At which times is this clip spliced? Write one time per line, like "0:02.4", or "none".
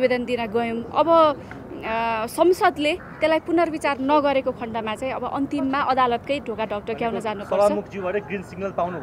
none